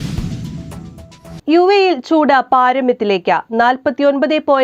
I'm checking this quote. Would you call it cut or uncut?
cut